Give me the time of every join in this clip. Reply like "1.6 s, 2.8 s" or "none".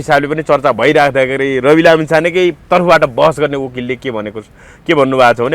none